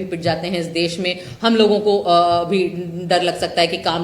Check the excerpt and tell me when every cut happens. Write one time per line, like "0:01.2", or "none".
none